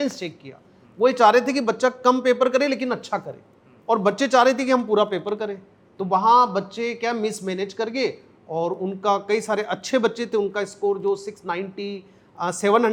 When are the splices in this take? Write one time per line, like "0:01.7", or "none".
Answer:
none

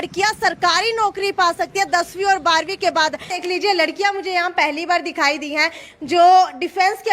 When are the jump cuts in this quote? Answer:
0:03.3

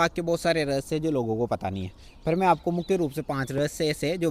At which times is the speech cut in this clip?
none

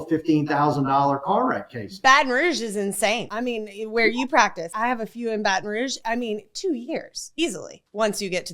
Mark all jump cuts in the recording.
0:03.3
0:04.8
0:06.0

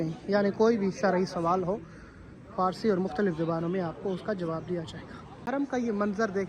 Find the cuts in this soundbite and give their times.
0:05.4

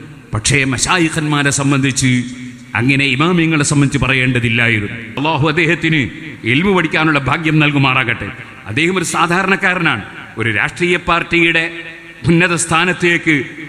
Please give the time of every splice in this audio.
0:05.2

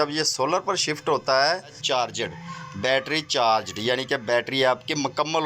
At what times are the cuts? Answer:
0:01.8

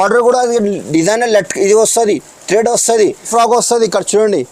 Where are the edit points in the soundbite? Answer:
0:03.3

